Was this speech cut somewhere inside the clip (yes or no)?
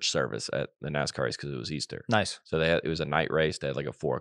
no